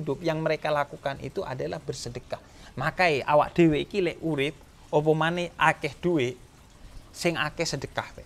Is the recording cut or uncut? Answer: uncut